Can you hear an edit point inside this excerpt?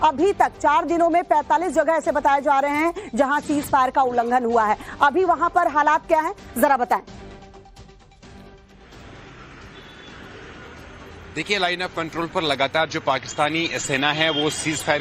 yes; 1 cut; at 12.4 s

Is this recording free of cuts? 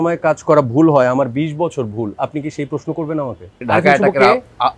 no; 1 cut; at 3.6 s

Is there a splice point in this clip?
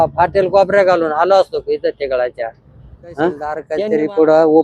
yes; 1 cut; at 3.7 s

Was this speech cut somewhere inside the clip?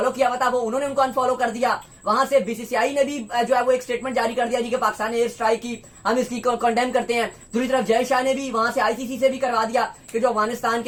no; 0 cuts

